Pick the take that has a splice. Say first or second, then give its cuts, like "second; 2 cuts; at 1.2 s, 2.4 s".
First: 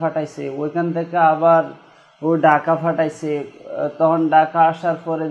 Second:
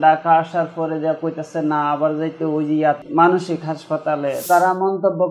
second; 2 cuts; at 3.0 s, 4.4 s